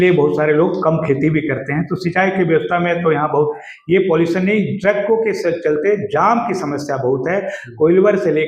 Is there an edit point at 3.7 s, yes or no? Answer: yes